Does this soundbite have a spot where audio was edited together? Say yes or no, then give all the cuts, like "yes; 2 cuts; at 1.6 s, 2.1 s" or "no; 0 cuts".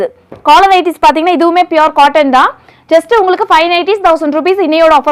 no; 0 cuts